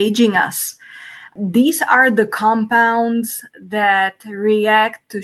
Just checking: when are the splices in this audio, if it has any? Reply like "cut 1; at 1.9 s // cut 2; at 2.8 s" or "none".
cut 1; at 1.3 s